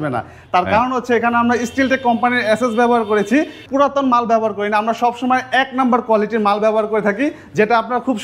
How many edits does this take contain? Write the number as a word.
one